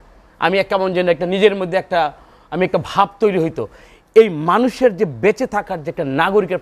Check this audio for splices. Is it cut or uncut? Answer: uncut